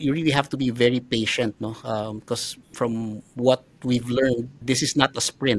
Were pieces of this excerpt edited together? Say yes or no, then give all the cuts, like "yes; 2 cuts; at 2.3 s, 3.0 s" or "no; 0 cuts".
no; 0 cuts